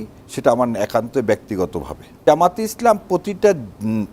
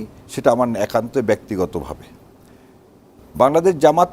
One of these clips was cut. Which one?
first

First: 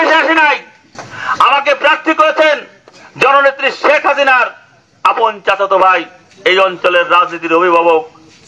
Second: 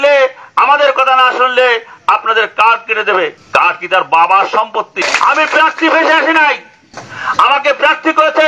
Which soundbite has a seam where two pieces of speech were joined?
second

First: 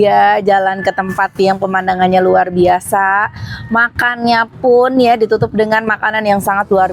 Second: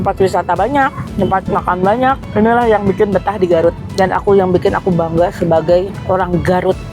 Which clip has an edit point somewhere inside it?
second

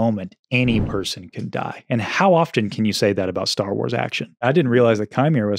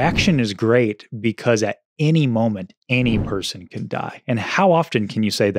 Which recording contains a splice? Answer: first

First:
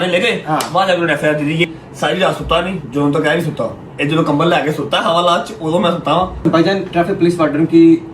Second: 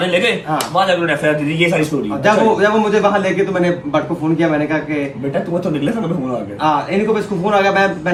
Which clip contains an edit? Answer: first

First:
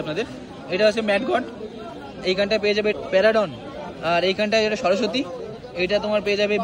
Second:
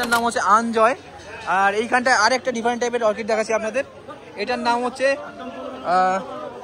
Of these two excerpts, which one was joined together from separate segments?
first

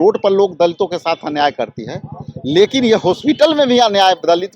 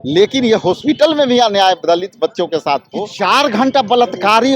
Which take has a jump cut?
second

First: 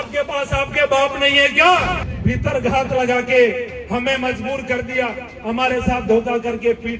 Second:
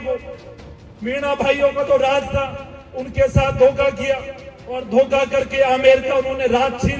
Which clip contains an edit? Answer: first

